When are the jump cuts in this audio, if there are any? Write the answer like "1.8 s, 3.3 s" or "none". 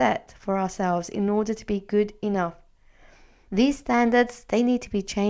3.4 s